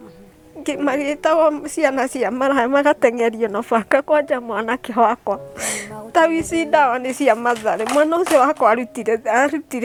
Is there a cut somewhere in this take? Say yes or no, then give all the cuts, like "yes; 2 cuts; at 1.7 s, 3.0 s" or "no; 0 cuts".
no; 0 cuts